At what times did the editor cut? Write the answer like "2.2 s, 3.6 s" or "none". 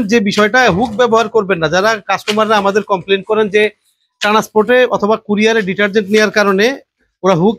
none